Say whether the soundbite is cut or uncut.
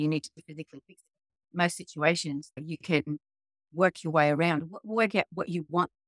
cut